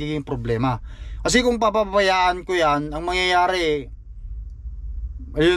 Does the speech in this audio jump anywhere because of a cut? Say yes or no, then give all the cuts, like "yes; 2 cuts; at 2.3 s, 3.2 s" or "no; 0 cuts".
no; 0 cuts